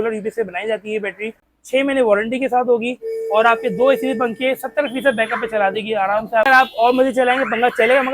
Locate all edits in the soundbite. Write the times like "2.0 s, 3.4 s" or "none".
1.4 s, 6.5 s